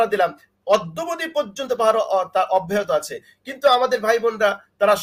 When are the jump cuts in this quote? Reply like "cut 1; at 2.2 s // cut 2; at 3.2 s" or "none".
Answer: none

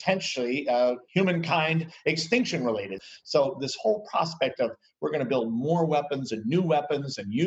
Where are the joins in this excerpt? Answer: cut 1; at 1.0 s // cut 2; at 3.0 s

